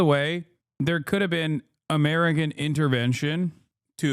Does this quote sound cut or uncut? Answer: uncut